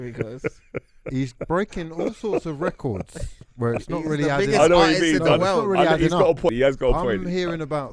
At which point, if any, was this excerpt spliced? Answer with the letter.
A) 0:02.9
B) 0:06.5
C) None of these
B